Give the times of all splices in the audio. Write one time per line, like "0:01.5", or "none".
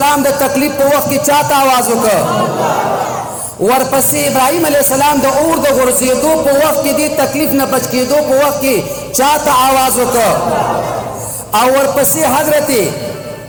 none